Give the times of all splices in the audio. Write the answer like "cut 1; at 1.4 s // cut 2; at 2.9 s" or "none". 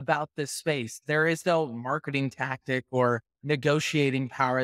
cut 1; at 3.3 s